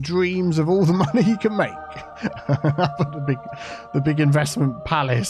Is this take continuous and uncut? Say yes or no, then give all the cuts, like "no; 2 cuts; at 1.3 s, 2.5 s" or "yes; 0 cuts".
yes; 0 cuts